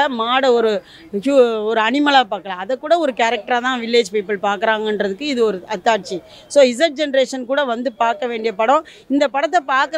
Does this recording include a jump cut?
no; 0 cuts

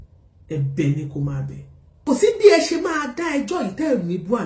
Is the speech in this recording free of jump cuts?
no; 1 cut; at 2.0 s

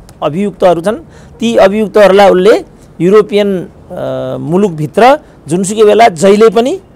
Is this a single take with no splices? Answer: yes; 0 cuts

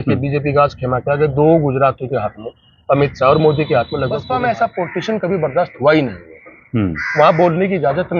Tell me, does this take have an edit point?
yes; 1 cut; at 4.2 s

